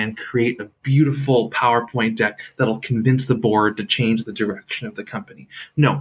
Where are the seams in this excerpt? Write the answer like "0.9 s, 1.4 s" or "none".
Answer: none